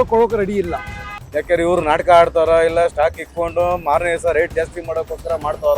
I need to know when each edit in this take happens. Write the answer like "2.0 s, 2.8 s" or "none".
1.3 s